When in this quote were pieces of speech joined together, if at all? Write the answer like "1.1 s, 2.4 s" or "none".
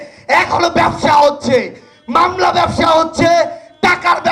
none